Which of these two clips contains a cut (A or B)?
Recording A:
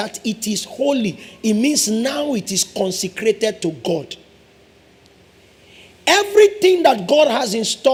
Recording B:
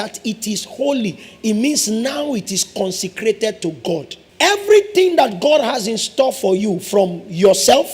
B